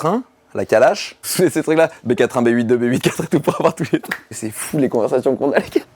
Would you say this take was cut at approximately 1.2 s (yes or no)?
yes